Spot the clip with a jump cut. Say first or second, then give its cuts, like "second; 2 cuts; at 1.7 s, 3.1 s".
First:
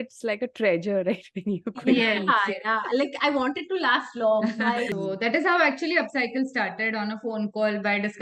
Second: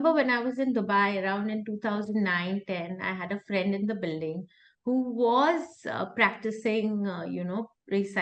first; 1 cut; at 4.9 s